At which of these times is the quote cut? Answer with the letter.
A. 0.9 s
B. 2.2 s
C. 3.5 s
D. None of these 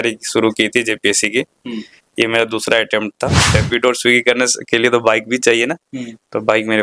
C